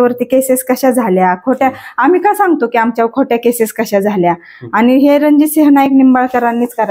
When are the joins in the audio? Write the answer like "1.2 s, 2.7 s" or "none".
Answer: none